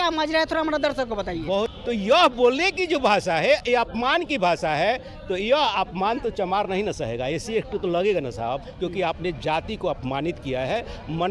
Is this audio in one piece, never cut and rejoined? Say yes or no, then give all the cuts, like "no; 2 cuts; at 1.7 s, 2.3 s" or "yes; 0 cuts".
no; 1 cut; at 1.8 s